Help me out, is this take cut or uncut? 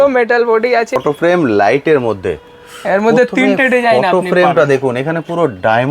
cut